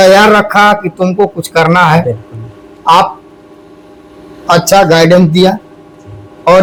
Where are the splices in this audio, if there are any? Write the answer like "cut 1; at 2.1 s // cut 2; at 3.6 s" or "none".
none